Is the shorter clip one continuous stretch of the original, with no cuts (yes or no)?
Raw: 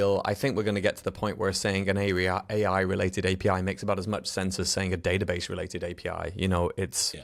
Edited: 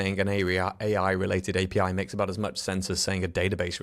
yes